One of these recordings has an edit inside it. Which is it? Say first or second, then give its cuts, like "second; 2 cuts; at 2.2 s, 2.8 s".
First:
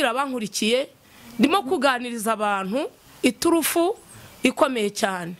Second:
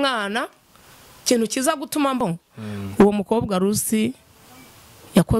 second; 1 cut; at 2.2 s